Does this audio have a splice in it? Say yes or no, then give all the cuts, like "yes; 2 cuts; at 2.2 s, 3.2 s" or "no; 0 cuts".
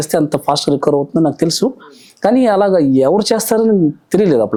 no; 0 cuts